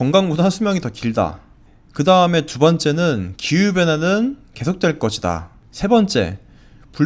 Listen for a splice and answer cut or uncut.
uncut